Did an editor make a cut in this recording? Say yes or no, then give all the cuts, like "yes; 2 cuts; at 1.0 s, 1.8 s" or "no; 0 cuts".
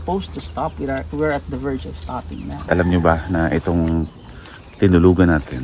yes; 1 cut; at 2.5 s